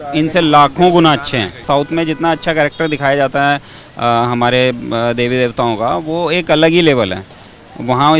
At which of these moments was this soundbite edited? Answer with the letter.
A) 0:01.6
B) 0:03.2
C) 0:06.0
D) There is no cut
A